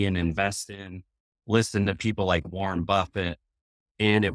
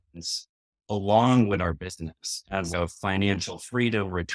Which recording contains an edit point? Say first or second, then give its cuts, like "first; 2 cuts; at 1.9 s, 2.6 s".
second; 1 cut; at 2.7 s